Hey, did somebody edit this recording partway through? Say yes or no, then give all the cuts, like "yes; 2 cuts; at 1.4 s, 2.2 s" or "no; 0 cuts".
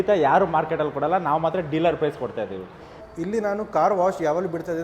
yes; 1 cut; at 3.0 s